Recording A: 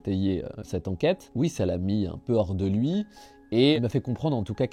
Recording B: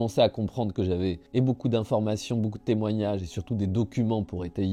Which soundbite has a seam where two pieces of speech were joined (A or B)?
A